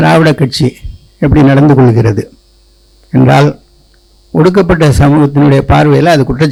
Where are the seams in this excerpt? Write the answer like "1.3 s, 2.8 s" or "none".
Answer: none